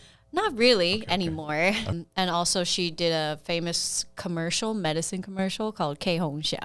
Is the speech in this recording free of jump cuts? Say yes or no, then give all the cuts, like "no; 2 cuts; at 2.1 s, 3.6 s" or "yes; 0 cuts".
no; 1 cut; at 1.9 s